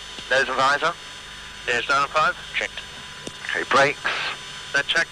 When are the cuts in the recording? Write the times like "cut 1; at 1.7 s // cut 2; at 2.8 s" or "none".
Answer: cut 1; at 3.4 s